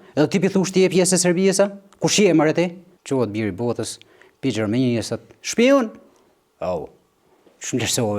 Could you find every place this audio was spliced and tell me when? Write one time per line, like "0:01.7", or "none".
0:02.9